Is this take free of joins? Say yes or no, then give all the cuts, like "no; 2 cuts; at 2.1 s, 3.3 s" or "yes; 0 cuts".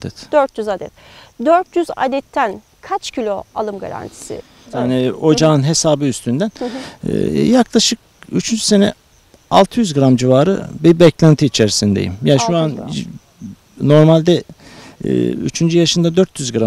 no; 1 cut; at 4.7 s